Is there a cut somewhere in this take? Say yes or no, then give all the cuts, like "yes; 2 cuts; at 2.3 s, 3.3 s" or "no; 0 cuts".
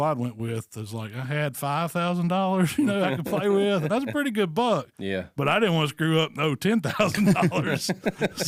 no; 0 cuts